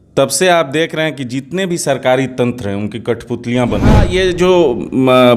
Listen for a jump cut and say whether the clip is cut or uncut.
cut